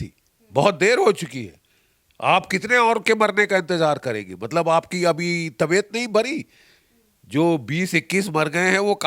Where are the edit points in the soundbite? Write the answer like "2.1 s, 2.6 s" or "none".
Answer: none